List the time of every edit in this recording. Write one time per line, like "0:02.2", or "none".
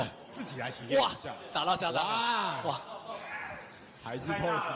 none